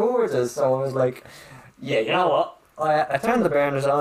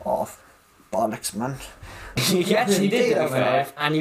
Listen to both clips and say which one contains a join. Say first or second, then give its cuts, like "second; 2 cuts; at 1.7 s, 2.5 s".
second; 1 cut; at 2.2 s